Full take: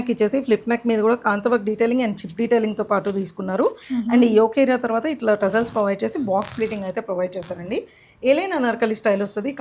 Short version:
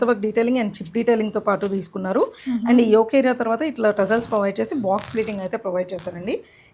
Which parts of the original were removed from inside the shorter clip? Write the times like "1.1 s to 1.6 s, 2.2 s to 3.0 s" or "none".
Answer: none